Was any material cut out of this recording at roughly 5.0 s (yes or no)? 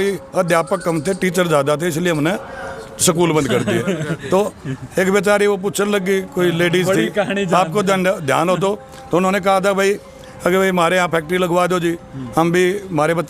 no